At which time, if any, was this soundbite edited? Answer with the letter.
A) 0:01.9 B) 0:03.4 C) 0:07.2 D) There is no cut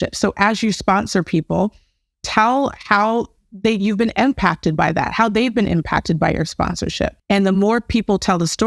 C